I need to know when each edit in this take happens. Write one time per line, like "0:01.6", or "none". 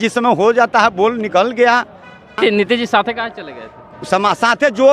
0:02.3